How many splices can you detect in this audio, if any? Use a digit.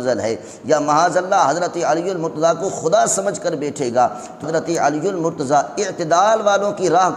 1